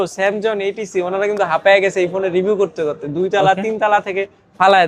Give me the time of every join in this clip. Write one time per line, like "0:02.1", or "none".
none